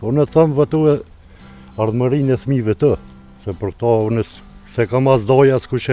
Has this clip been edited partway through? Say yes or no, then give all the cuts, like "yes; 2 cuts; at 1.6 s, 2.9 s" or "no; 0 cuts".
no; 0 cuts